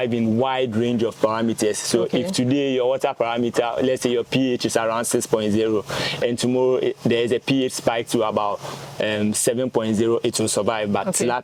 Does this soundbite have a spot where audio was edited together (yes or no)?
no